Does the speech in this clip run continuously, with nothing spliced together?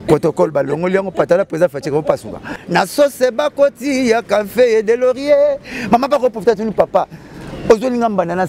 no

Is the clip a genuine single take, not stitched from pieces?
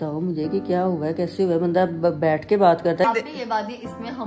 no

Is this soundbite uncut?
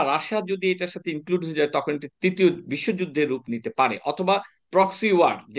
no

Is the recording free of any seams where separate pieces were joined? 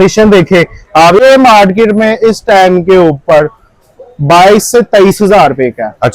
no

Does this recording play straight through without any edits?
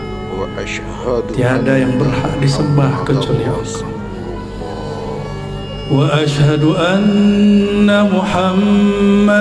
yes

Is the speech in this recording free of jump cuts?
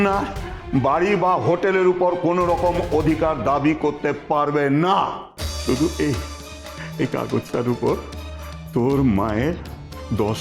yes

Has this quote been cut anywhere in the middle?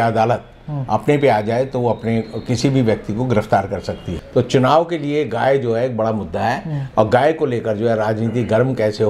yes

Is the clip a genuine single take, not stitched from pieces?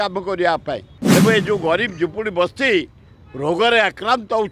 no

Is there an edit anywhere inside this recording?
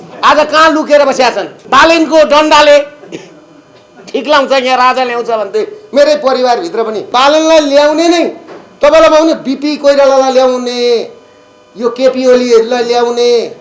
yes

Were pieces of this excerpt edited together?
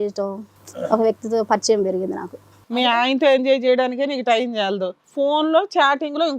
yes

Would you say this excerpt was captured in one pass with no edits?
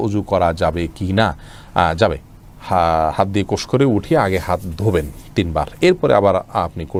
yes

